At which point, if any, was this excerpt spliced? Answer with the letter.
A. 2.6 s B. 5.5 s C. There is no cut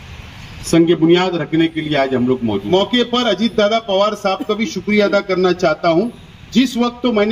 A